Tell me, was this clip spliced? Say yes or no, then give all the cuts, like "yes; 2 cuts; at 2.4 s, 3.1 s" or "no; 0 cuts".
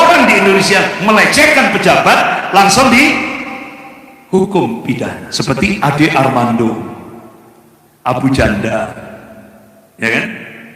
yes; 1 cut; at 5.3 s